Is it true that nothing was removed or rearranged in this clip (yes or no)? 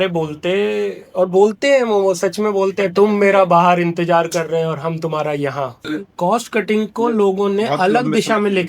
no